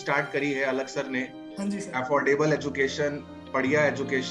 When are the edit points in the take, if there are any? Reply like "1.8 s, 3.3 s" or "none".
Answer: none